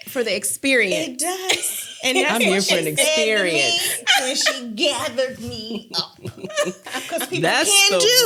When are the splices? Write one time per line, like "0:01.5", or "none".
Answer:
none